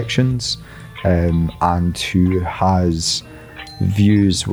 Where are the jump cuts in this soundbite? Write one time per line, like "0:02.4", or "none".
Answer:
none